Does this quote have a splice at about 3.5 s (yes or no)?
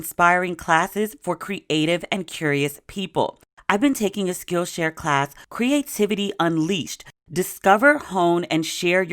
yes